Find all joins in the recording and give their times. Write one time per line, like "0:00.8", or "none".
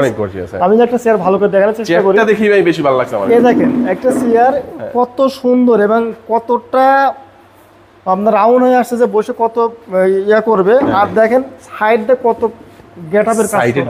none